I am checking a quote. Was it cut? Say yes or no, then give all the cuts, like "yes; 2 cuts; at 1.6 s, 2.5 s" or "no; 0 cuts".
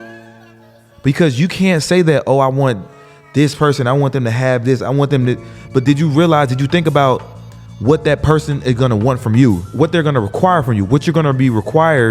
yes; 2 cuts; at 0.9 s, 9.7 s